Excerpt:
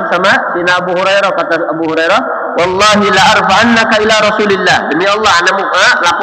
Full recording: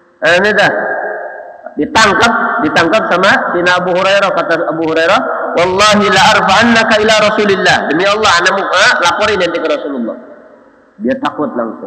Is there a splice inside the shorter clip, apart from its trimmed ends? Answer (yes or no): no